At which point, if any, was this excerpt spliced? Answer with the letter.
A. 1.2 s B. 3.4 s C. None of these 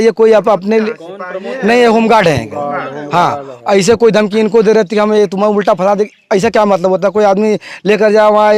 C